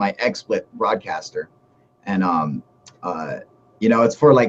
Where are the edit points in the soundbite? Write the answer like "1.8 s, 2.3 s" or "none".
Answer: 1.6 s